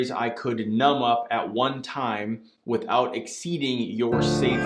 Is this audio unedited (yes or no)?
yes